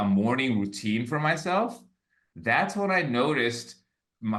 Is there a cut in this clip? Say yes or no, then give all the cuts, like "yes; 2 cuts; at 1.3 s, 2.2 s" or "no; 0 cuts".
no; 0 cuts